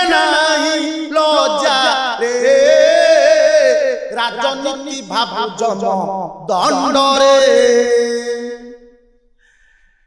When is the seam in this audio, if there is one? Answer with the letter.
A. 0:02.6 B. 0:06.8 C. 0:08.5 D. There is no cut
D